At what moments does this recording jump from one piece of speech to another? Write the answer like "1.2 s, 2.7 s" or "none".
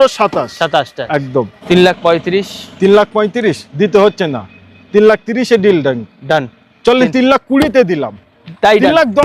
1.6 s